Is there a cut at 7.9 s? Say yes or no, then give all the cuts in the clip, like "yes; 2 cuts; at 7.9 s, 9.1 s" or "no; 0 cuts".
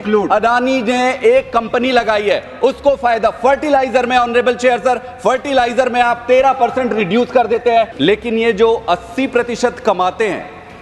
yes; 1 cut; at 7.9 s